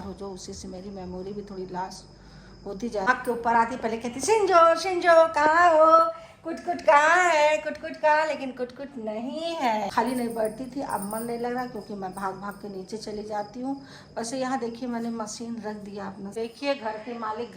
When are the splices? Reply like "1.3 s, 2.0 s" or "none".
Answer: 3.1 s, 9.9 s, 16.3 s